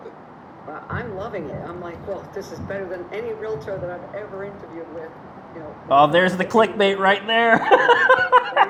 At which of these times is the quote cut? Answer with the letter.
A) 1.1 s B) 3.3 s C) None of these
C